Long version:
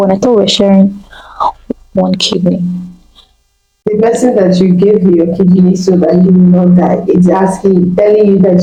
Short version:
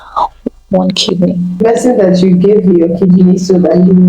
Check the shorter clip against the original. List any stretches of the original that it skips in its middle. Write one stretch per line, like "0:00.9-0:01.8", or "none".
0:02.8-0:04.0